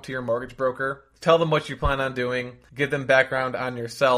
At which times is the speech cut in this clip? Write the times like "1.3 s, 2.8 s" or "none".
1.0 s, 2.6 s